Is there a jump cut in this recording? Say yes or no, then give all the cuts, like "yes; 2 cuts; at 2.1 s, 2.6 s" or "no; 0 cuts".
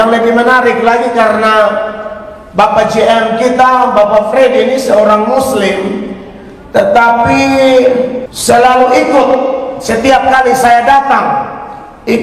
yes; 1 cut; at 8.3 s